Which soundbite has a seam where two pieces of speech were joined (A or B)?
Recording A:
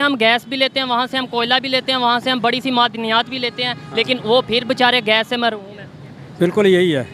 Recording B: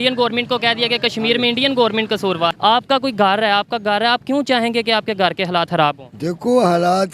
B